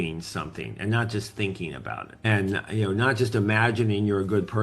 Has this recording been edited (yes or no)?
yes